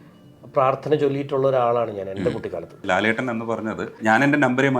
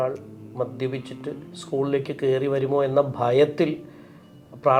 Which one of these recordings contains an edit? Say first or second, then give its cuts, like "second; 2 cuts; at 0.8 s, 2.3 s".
first; 2 cuts; at 2.8 s, 4.0 s